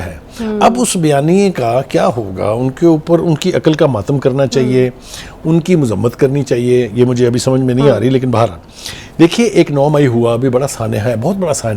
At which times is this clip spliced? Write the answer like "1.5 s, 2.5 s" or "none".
none